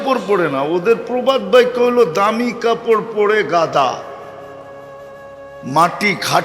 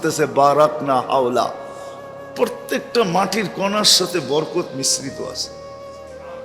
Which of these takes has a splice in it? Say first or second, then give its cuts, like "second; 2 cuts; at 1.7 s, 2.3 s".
second; 1 cut; at 5.5 s